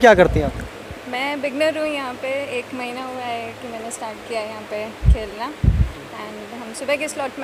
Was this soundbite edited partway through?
no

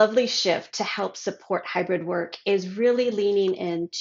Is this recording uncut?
yes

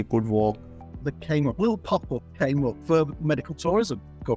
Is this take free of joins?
no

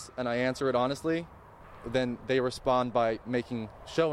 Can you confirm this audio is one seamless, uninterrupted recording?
yes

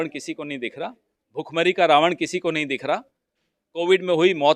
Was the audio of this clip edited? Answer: no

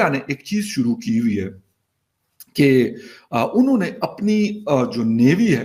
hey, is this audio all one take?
yes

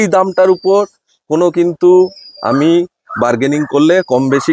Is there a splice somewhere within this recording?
no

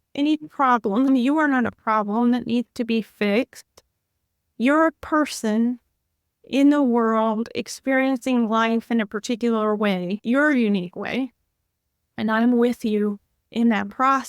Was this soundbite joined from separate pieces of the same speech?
yes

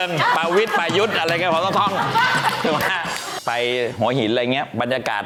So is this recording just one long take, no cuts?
yes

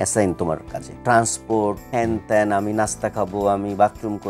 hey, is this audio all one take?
no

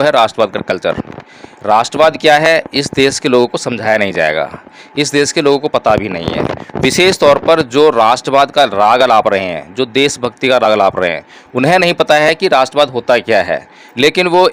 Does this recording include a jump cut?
no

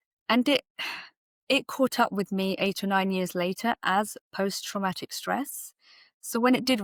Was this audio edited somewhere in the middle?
no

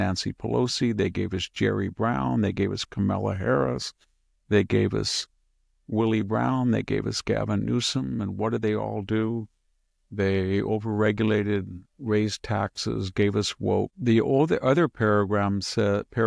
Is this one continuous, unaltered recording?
no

